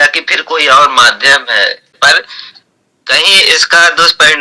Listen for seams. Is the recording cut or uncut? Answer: cut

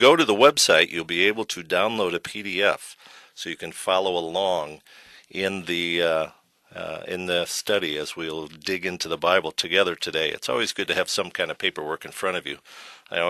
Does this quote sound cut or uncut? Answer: uncut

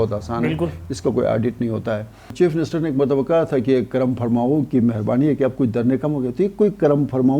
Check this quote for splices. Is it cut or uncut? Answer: cut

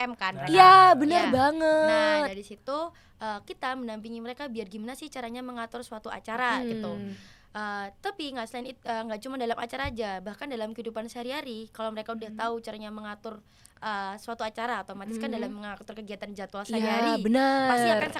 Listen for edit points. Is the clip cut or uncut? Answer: uncut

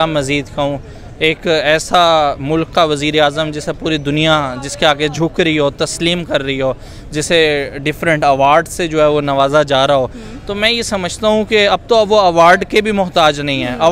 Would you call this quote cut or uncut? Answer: uncut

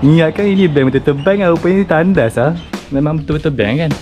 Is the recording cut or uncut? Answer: cut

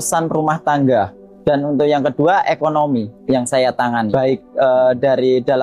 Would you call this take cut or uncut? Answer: cut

